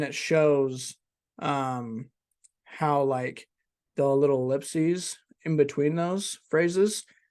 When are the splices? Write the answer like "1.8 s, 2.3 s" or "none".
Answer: none